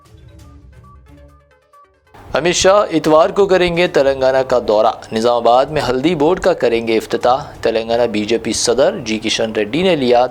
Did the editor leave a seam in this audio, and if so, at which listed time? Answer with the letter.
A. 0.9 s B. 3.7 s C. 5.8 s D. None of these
A